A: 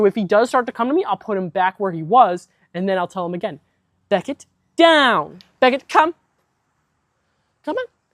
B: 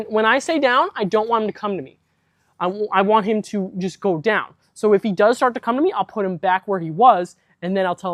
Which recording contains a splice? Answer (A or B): A